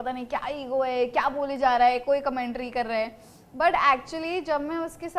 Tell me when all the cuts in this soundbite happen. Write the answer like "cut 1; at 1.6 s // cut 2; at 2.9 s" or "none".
none